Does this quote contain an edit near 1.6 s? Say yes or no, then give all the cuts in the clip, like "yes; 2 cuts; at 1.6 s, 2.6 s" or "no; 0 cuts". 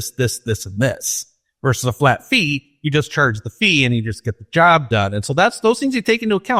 no; 0 cuts